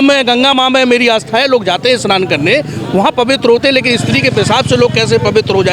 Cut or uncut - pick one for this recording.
uncut